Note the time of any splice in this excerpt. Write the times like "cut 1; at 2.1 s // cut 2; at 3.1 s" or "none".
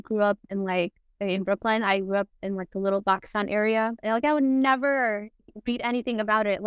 cut 1; at 4.0 s